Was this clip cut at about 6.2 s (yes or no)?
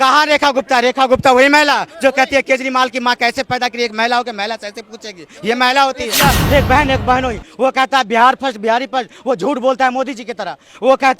yes